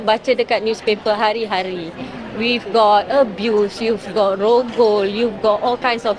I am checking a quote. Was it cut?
no; 0 cuts

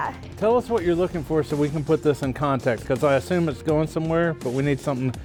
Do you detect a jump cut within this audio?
no; 0 cuts

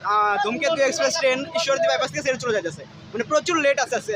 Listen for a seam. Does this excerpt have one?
no; 0 cuts

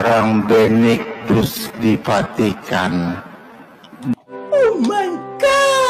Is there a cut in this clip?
yes; 1 cut; at 4.7 s

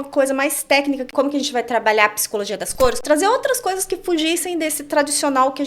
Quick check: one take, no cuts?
no; 2 cuts; at 1.1 s, 3.0 s

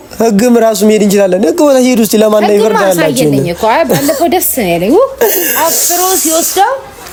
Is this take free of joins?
yes; 0 cuts

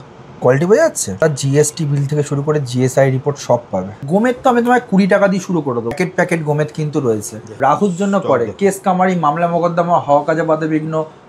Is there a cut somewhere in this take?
yes; 4 cuts; at 1.2 s, 4.0 s, 6.0 s, 7.5 s

